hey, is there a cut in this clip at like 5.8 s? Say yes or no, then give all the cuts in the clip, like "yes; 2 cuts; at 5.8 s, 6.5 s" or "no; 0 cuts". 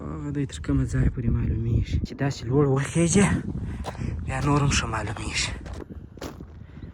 yes; 2 cuts; at 2.0 s, 5.8 s